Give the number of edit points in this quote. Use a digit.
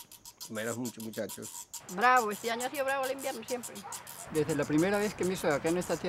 2